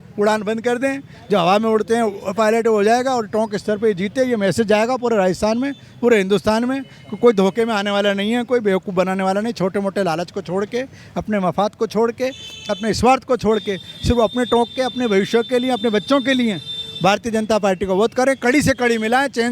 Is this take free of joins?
yes; 0 cuts

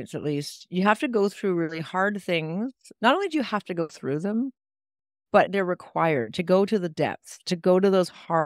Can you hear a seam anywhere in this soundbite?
yes; 1 cut; at 5.5 s

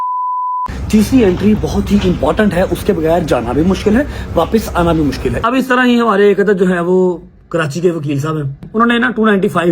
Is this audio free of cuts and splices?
no; 2 cuts; at 5.4 s, 8.7 s

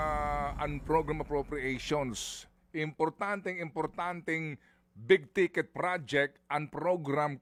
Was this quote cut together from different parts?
no; 0 cuts

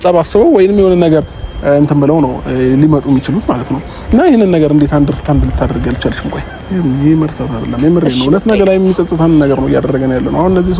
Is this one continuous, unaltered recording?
no; 1 cut; at 6.5 s

